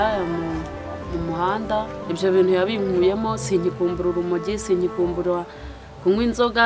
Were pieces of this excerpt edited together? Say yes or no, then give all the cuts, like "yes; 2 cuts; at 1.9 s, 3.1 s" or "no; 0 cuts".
yes; 1 cut; at 2.0 s